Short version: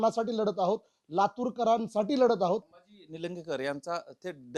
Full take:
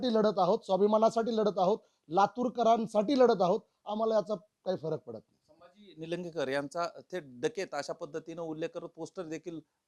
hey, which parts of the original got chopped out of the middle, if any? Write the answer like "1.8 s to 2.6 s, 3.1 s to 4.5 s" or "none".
3.8 s to 5.7 s

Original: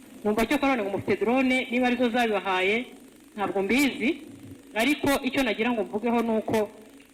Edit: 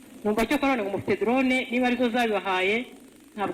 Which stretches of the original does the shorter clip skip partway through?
none

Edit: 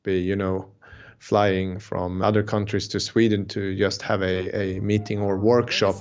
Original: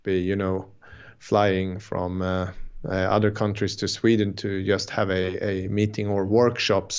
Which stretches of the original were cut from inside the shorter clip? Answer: 2.2 s to 3.1 s

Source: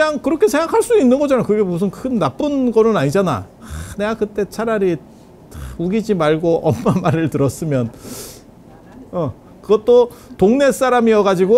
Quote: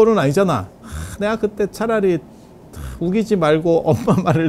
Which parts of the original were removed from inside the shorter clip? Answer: none

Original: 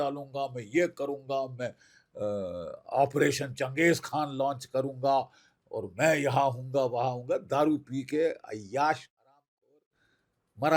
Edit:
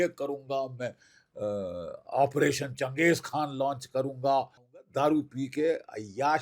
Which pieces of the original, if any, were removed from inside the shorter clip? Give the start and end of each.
5.7 s to 7.4 s

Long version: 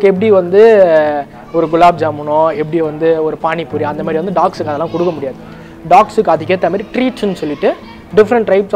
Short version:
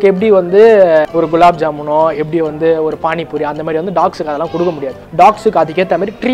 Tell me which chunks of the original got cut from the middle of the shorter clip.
1.1 s to 1.5 s, 5.3 s to 5.7 s

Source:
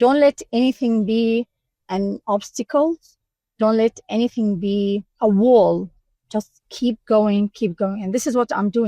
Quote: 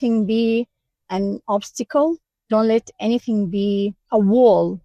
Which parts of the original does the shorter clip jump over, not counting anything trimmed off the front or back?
3.1 s to 3.4 s

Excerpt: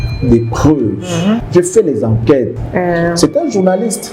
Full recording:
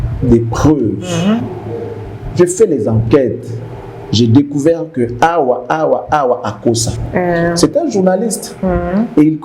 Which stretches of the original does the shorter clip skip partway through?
1.4 s to 2.3 s, 3.4 s to 7.0 s

